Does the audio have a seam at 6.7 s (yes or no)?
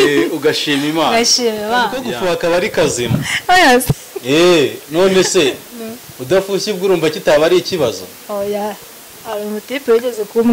no